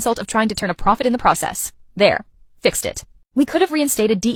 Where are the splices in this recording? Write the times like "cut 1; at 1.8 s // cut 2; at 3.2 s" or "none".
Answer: none